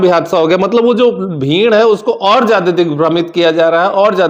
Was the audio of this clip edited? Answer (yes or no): no